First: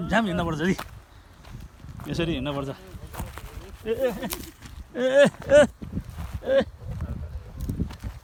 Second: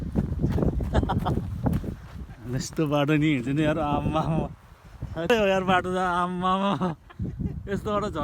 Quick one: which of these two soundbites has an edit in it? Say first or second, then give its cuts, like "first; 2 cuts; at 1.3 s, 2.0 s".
second; 1 cut; at 5.3 s